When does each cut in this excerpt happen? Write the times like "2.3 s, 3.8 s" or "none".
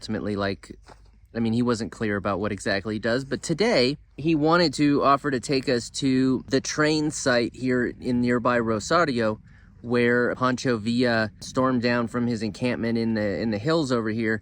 4.1 s, 6.4 s, 10.4 s, 11.5 s